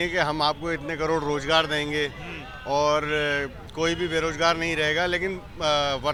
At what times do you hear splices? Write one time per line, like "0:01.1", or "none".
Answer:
none